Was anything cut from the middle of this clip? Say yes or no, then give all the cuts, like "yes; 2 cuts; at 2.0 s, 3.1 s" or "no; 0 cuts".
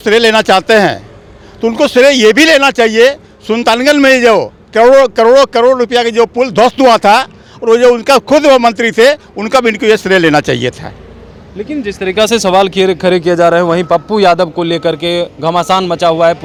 no; 0 cuts